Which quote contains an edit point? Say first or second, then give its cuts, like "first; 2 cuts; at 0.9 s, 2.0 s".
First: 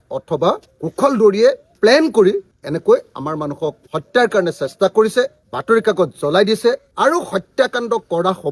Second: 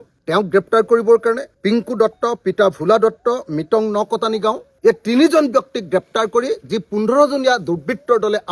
first; 2 cuts; at 1.7 s, 6.9 s